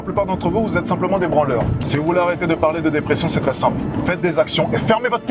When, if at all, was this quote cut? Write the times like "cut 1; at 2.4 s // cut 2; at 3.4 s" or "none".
cut 1; at 1.8 s